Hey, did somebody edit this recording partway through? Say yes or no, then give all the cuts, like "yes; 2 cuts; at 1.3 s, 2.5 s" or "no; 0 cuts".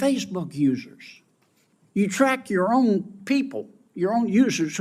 no; 0 cuts